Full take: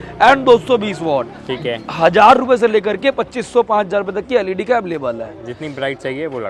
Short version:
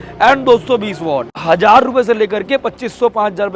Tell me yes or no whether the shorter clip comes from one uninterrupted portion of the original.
no